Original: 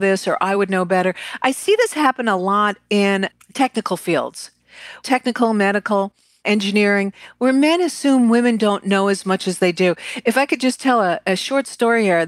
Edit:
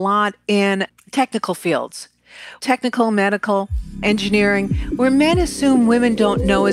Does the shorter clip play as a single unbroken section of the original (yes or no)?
yes